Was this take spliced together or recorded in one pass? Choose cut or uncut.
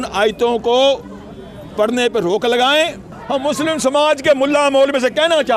cut